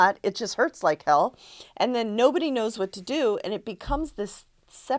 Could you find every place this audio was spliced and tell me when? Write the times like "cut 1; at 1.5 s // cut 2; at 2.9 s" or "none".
none

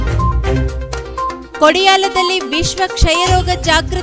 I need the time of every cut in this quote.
cut 1; at 1.0 s

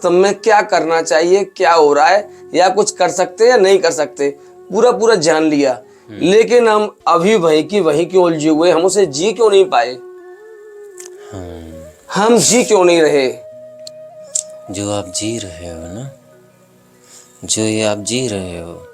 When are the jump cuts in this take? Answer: none

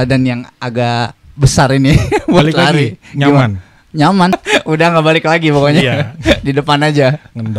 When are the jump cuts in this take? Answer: cut 1; at 4.4 s

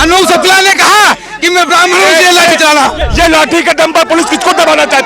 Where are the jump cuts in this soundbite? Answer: cut 1; at 3.0 s

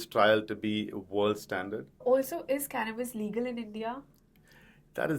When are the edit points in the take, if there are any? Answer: cut 1; at 1.9 s

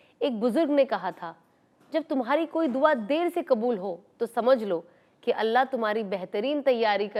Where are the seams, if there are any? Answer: none

